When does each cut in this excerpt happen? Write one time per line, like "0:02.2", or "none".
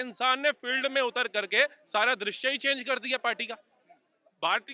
none